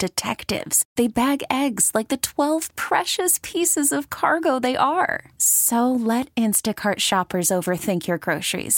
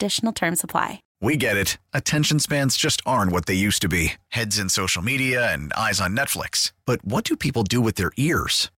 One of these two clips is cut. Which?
second; 1 cut; at 1.1 s

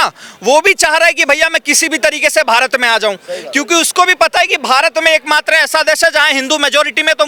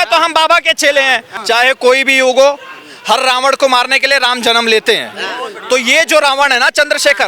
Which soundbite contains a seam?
second; 1 cut; at 1.3 s

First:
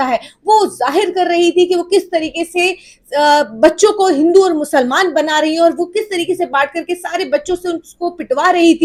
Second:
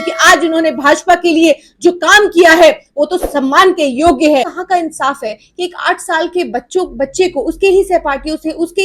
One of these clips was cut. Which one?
second; 1 cut; at 4.6 s

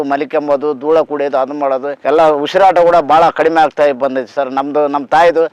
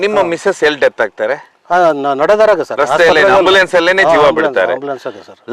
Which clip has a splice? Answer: first; 1 cut; at 1.9 s

